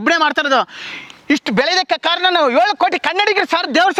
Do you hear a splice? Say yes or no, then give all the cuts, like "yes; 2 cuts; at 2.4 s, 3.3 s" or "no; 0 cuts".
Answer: no; 0 cuts